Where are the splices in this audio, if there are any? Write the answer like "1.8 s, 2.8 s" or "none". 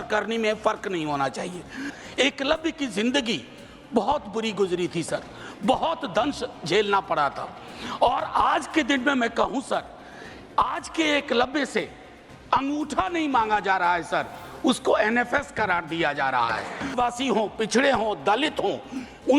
1.9 s, 16.9 s